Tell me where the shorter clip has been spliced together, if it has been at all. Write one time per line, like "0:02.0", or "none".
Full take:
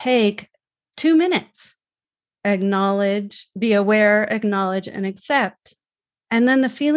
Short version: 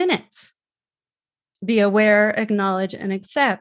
0:01.2